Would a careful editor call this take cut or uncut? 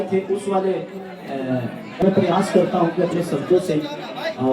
cut